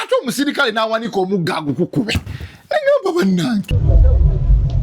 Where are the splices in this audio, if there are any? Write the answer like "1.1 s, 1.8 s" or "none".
3.7 s